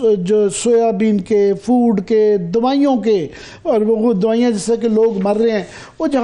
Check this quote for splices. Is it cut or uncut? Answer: uncut